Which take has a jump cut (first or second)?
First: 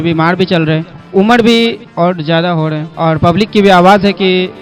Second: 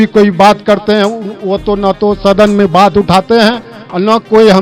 first